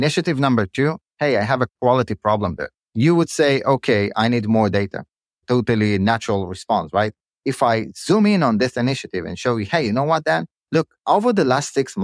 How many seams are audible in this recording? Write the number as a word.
three